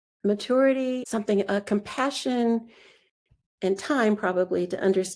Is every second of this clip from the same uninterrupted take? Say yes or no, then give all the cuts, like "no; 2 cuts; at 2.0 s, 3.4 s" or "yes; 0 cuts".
no; 1 cut; at 1.0 s